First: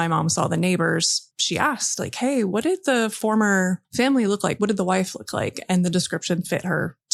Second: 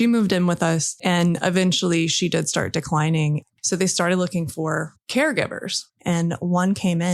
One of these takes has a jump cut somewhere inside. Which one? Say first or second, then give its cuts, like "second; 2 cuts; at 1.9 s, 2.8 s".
second; 2 cuts; at 3.5 s, 5.9 s